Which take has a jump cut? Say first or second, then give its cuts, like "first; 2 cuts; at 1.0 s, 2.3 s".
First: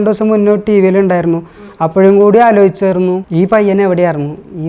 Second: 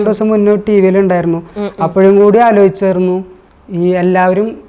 first; 1 cut; at 3.2 s